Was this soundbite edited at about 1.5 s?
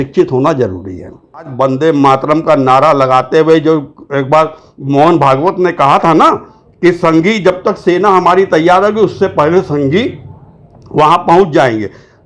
yes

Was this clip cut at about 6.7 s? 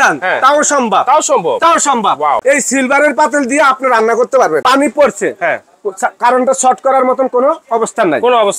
no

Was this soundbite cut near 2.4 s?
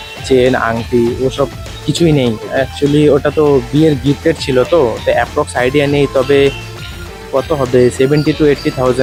no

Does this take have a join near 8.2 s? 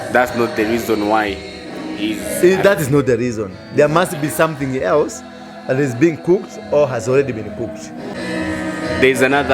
yes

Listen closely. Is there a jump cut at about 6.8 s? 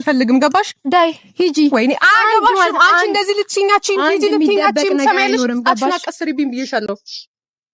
no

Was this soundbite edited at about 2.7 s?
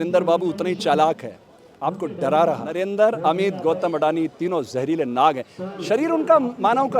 yes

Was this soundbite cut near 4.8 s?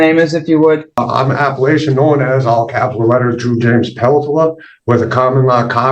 no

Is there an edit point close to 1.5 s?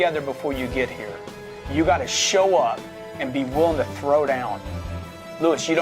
no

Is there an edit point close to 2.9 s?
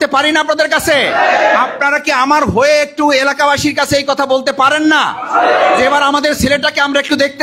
no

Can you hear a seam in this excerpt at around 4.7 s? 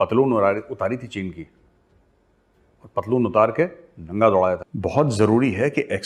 yes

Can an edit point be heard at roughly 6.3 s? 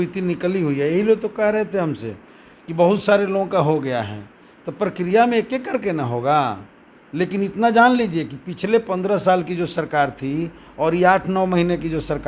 no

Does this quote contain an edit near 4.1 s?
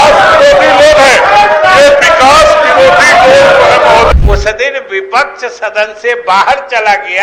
yes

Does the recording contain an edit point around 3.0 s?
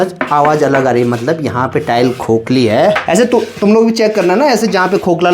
yes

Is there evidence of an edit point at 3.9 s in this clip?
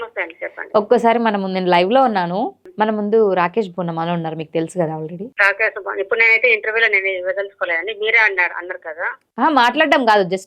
no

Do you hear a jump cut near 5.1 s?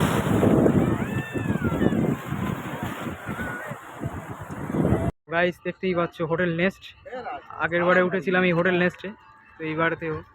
yes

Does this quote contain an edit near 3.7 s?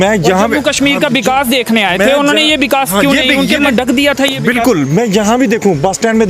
yes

